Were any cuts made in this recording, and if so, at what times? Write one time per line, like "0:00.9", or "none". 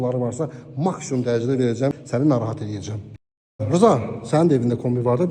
0:01.9
0:03.6